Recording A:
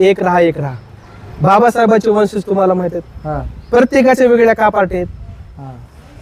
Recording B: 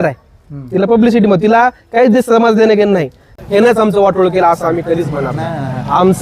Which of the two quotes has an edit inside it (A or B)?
B